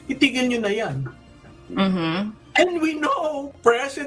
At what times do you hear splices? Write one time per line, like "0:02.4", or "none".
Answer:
0:02.8